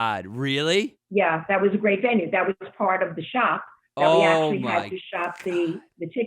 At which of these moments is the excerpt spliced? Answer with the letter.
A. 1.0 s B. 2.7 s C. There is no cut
A